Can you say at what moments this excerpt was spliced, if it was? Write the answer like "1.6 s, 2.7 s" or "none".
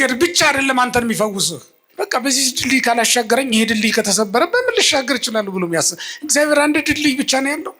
1.8 s